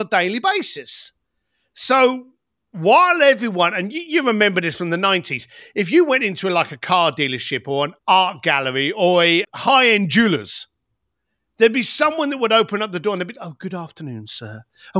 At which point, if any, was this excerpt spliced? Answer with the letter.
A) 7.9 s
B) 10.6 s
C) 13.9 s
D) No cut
A